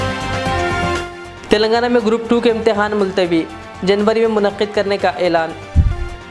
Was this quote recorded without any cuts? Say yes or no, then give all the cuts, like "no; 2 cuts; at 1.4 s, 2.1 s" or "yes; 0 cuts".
yes; 0 cuts